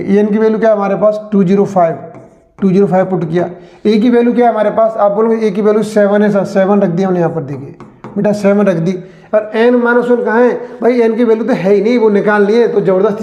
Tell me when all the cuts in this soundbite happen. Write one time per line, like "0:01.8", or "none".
none